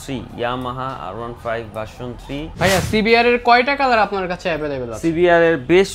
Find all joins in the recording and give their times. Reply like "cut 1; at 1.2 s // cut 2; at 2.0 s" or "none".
cut 1; at 2.5 s